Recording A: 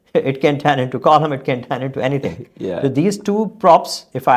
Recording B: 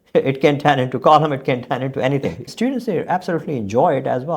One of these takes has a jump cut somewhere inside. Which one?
B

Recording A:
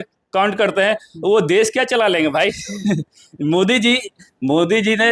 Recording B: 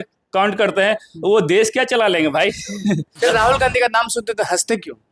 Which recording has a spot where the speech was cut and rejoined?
B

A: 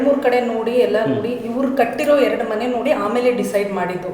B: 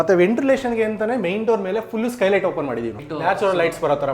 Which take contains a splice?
B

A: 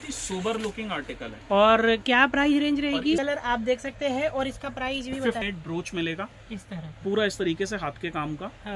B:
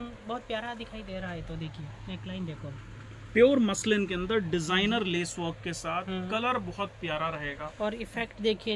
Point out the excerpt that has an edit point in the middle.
A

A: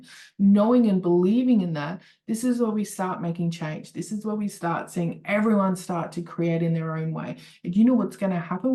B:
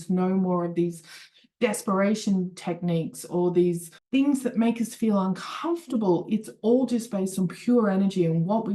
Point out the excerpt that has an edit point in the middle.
B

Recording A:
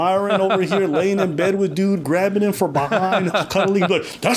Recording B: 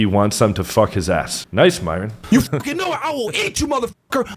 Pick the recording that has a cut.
B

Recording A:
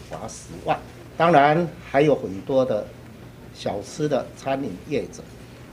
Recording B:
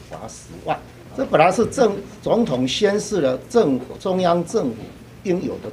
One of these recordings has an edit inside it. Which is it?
B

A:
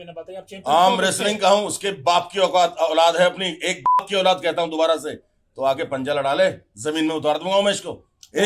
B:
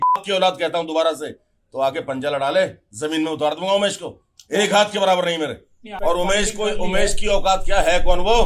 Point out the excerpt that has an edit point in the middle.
B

